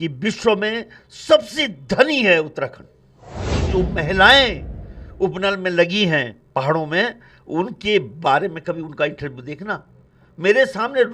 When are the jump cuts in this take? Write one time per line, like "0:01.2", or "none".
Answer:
0:03.6